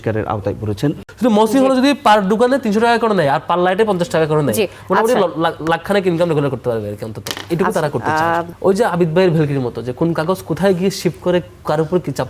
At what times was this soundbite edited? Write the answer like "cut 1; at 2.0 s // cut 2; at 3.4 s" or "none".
cut 1; at 1.1 s // cut 2; at 8.1 s